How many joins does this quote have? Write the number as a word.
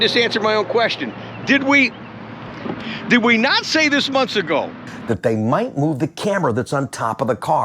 one